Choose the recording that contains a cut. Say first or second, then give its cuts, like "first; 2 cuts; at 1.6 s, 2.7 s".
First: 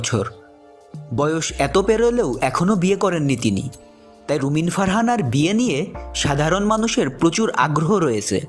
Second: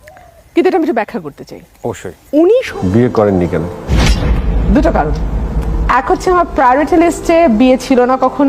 second; 1 cut; at 2.7 s